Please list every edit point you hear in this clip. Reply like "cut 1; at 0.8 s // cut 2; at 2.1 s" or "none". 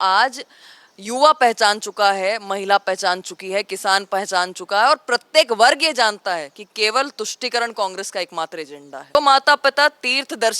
cut 1; at 9.2 s